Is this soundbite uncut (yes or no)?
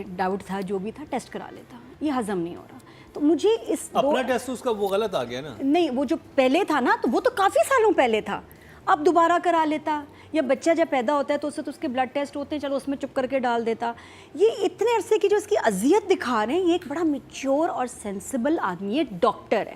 yes